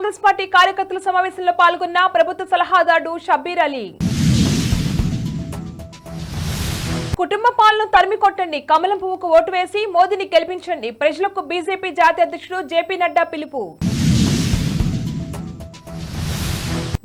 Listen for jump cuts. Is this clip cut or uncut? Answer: uncut